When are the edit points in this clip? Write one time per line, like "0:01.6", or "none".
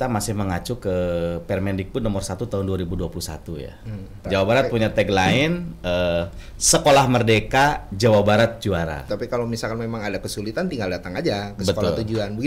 0:04.2
0:09.1